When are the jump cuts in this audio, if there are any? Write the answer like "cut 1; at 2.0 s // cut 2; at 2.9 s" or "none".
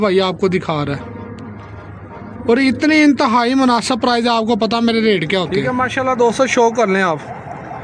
cut 1; at 5.6 s